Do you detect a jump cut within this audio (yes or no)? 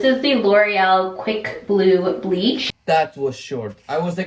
no